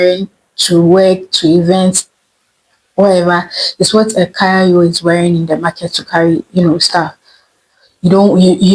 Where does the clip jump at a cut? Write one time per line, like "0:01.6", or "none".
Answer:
none